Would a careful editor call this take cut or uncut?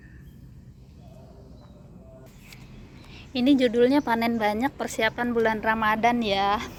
uncut